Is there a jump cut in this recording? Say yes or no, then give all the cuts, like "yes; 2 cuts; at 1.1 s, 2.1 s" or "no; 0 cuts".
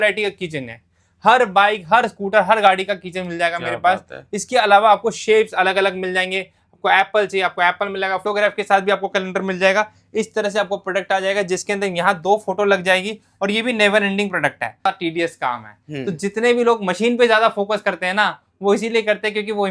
yes; 2 cuts; at 8.2 s, 14.9 s